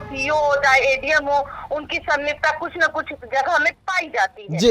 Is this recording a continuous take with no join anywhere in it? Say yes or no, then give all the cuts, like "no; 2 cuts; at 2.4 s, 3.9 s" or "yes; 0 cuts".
yes; 0 cuts